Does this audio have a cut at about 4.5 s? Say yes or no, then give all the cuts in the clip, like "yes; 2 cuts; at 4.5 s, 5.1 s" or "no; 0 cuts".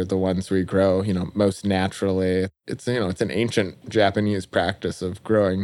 no; 1 cut; at 2.6 s